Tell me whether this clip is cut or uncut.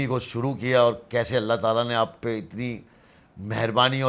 uncut